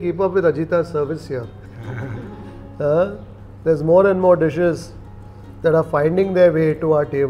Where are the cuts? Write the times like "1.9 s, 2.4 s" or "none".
none